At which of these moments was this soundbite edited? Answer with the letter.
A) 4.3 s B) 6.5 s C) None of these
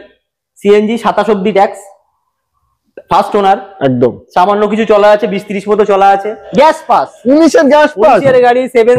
B